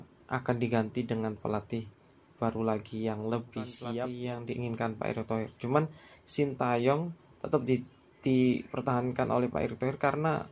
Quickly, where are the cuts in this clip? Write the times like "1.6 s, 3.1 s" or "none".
4.1 s